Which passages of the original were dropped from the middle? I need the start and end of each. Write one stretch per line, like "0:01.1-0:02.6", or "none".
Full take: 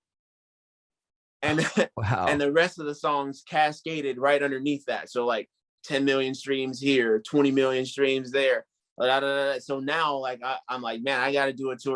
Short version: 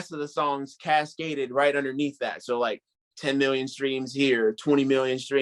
none